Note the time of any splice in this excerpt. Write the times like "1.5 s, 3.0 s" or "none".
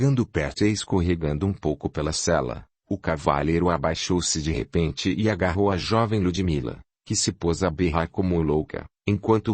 7.1 s